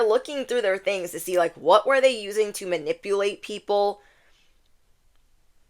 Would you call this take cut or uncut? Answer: uncut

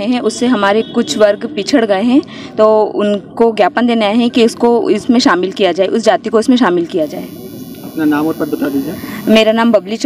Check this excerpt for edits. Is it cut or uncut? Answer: cut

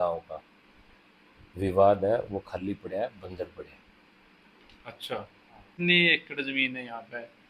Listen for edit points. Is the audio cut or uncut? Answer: cut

